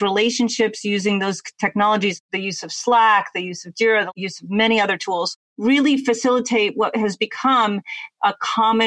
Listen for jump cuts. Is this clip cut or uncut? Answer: cut